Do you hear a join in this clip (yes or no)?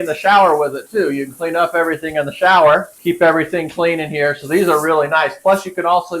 yes